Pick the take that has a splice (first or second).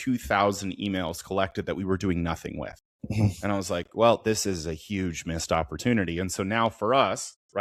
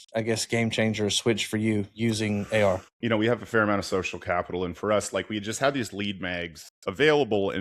second